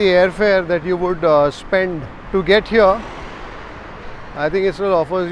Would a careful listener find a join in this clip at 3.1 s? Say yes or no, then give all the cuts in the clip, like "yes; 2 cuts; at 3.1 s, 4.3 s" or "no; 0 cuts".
no; 0 cuts